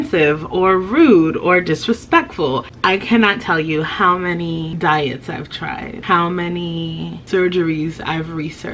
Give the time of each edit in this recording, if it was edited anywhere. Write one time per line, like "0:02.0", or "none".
0:02.7
0:04.7
0:05.9
0:07.2